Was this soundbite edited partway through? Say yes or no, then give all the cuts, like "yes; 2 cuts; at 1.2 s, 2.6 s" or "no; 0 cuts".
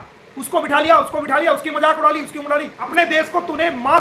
yes; 1 cut; at 2.8 s